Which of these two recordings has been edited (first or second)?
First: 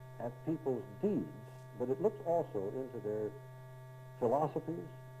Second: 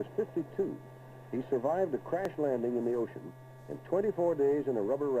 second